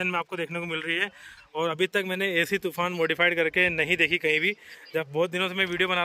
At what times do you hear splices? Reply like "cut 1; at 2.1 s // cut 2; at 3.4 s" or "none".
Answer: none